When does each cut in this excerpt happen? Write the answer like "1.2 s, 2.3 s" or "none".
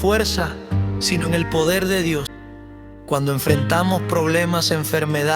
2.3 s